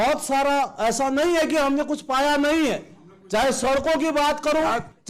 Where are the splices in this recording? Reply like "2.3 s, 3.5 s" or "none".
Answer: none